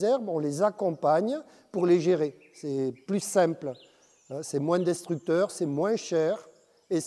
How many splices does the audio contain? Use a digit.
0